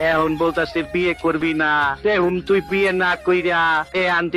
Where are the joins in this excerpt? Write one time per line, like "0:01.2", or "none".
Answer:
none